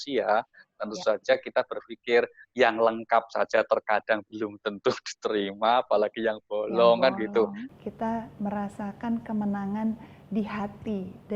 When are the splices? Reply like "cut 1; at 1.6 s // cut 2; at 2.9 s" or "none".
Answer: cut 1; at 7.6 s